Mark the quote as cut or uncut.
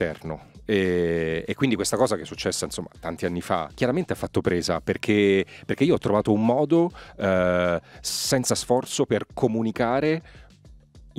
cut